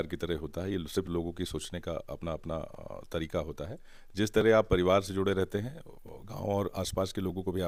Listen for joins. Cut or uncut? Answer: uncut